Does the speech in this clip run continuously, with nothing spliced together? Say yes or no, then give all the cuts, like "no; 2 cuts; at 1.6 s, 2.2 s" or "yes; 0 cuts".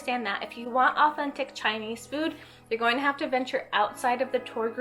yes; 0 cuts